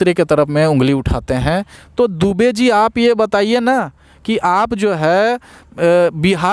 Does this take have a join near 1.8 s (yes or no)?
yes